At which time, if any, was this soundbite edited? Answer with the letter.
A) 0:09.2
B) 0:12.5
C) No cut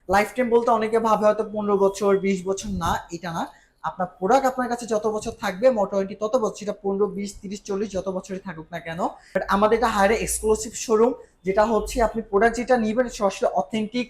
A